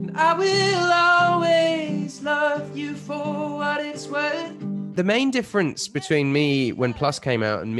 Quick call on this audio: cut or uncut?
cut